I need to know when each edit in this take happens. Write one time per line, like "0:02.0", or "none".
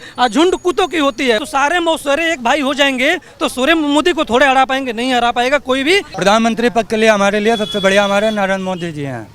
0:01.4
0:06.1